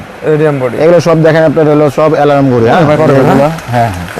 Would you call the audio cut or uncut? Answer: cut